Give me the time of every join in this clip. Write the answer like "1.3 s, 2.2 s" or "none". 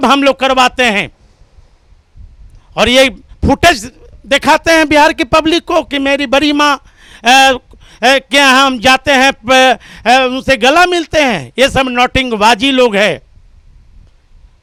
none